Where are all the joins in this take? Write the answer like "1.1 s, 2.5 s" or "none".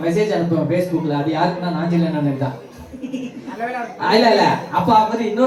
none